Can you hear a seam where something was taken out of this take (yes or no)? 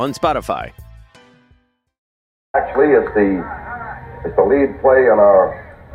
yes